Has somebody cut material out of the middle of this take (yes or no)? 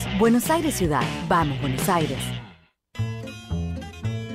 yes